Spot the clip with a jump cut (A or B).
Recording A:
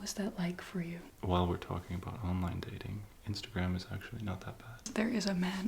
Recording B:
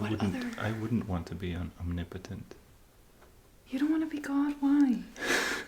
A